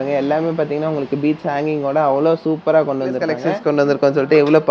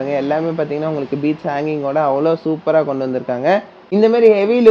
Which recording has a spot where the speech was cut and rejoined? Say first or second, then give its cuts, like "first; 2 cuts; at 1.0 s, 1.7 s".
first; 1 cut; at 3.4 s